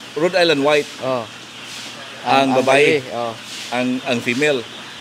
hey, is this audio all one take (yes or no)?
yes